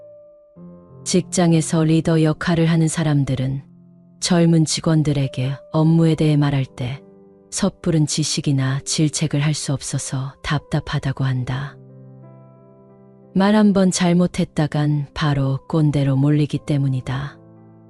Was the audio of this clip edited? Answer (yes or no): yes